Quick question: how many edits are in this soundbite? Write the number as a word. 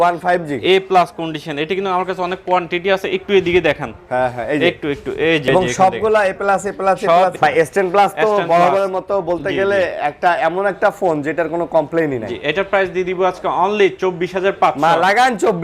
two